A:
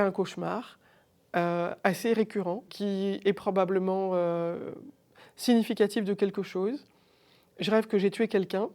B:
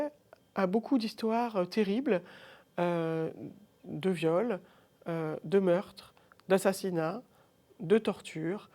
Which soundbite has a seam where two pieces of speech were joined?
A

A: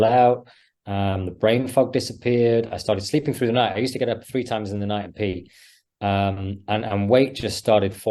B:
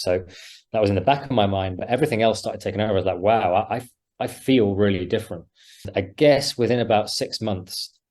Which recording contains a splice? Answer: B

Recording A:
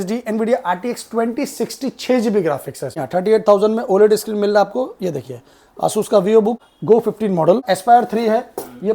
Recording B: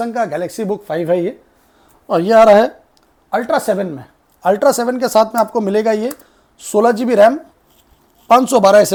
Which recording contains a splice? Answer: A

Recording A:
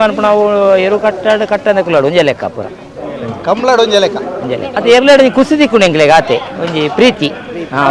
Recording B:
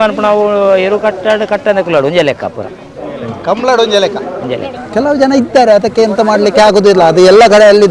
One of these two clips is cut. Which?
B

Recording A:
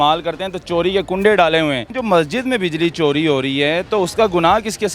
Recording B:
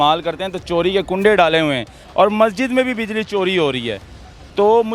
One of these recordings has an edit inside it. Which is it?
A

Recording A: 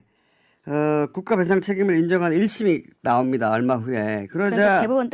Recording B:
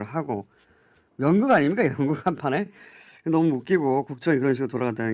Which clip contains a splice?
A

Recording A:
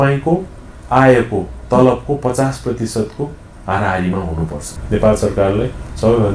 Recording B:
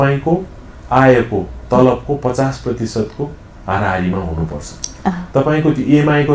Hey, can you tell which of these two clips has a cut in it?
A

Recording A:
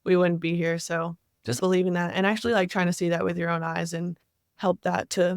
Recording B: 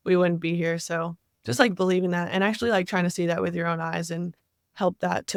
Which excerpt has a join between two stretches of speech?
A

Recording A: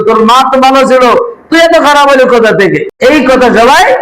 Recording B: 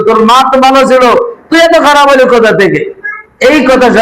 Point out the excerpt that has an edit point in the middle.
A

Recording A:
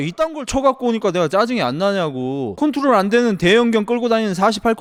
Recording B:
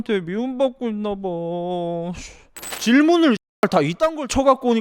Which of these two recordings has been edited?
B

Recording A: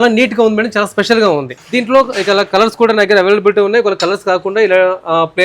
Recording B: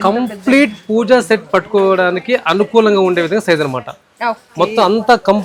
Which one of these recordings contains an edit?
A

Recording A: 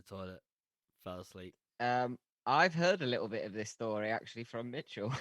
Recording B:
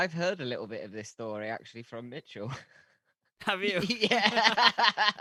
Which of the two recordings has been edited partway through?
A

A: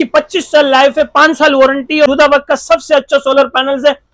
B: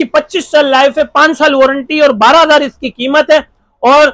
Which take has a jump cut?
A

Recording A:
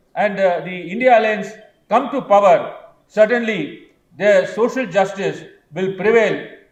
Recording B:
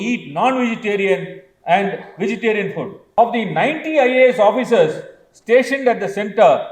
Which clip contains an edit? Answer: B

